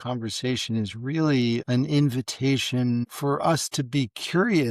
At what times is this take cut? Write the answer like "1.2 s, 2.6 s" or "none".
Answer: 3.1 s